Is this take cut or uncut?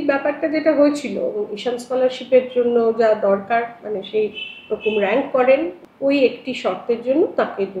cut